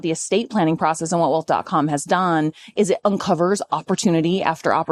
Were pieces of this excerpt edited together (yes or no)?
no